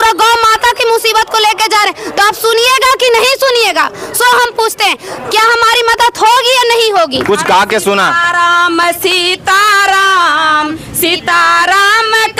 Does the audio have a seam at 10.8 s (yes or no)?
no